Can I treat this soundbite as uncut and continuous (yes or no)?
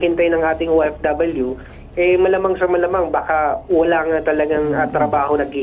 yes